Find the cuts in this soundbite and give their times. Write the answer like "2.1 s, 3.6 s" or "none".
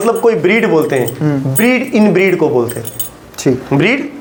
none